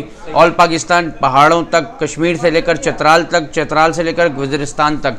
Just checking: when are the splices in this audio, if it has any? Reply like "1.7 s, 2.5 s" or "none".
none